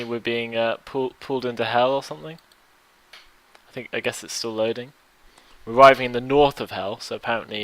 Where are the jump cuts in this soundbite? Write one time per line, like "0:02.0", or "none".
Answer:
0:02.2